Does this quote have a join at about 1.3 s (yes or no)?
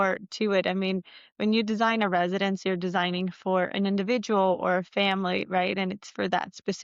no